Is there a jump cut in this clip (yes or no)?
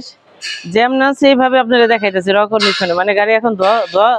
no